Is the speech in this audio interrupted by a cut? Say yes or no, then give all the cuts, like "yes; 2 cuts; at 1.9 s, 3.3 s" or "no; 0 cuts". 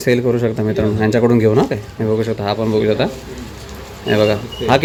no; 0 cuts